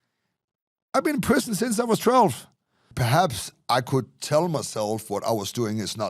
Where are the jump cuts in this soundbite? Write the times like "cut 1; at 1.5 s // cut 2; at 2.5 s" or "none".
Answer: cut 1; at 2.9 s